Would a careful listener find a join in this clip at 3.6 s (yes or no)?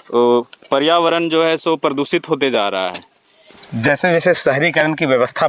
yes